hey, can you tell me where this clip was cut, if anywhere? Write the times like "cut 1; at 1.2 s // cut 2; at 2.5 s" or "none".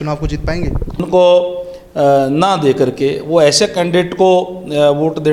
cut 1; at 1.0 s